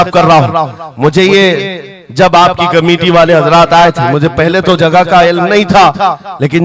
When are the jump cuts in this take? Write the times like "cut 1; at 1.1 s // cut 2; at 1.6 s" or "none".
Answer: none